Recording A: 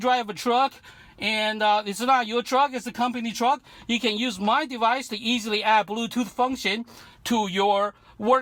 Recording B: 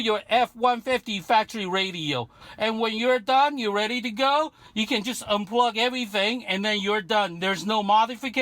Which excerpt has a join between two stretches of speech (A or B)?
B